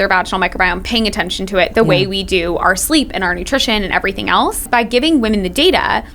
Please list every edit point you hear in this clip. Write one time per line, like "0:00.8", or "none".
0:04.6